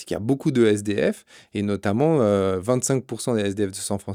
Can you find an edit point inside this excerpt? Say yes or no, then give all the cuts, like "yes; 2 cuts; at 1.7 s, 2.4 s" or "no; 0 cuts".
no; 0 cuts